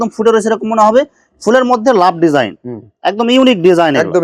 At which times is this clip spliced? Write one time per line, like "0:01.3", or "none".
none